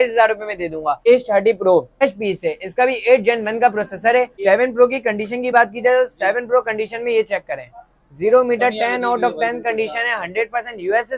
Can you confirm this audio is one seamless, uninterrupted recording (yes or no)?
no